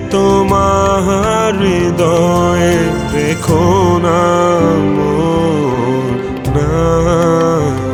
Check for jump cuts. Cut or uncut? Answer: uncut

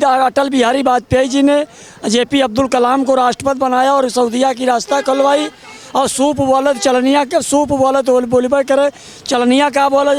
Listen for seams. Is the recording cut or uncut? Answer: uncut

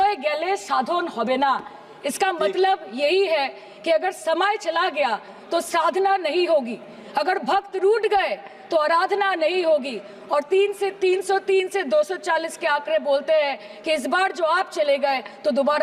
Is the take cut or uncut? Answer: uncut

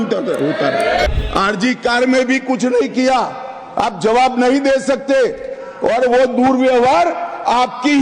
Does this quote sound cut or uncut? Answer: cut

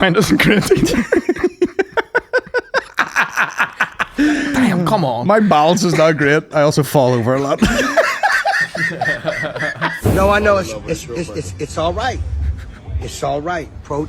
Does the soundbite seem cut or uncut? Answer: cut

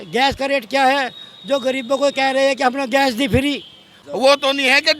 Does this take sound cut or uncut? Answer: cut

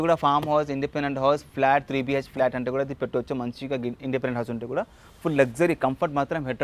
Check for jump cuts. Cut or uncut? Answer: uncut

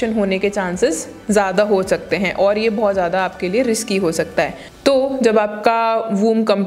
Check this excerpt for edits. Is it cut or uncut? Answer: uncut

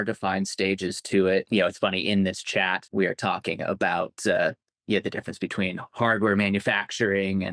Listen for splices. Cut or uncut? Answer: cut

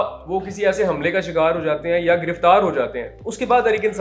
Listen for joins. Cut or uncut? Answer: uncut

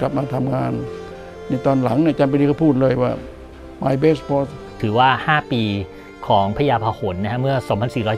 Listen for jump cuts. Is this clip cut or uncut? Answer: cut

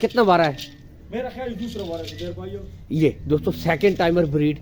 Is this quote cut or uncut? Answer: uncut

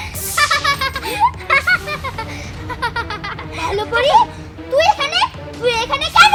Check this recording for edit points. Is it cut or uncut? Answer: uncut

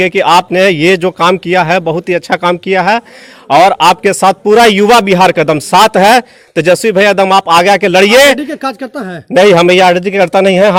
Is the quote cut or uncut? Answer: uncut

